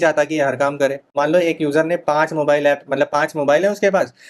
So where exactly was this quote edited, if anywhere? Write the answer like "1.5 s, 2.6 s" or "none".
1.1 s